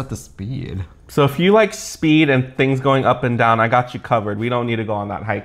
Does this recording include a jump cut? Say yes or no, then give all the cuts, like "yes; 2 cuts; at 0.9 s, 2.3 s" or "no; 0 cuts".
no; 0 cuts